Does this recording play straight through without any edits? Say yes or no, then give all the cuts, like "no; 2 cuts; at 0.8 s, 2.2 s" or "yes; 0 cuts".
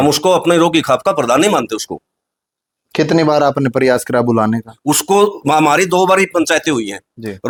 yes; 0 cuts